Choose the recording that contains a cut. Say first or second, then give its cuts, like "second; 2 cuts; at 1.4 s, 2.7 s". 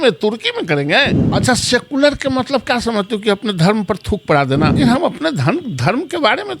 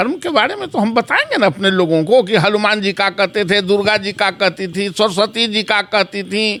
first; 2 cuts; at 1.2 s, 4.7 s